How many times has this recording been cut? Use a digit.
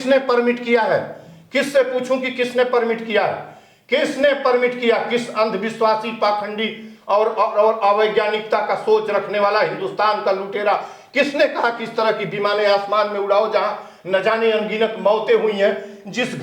0